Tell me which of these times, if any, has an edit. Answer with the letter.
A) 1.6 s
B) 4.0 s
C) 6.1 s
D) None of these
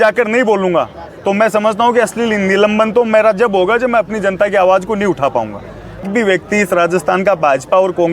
C